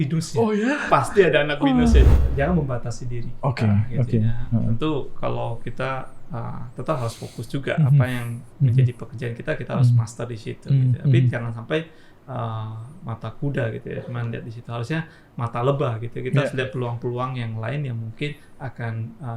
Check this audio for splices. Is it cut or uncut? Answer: cut